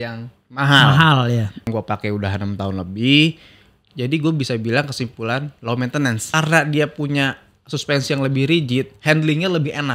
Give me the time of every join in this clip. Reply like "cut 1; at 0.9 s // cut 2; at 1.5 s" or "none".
cut 1; at 1.7 s // cut 2; at 6.2 s